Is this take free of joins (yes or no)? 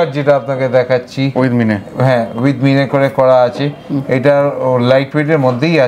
yes